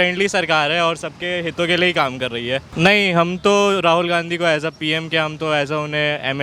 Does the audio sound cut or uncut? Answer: cut